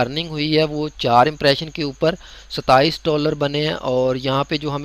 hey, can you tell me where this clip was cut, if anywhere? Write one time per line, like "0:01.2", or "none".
none